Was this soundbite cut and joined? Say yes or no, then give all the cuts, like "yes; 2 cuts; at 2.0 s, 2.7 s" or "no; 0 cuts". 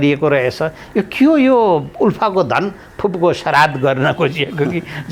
no; 0 cuts